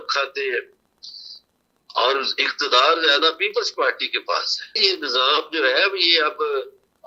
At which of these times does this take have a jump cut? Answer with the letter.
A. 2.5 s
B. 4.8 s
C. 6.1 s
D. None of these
B